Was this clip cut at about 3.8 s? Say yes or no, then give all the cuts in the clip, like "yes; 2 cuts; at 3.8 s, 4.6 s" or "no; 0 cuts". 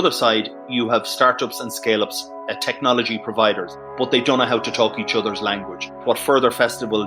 yes; 2 cuts; at 3.8 s, 6.0 s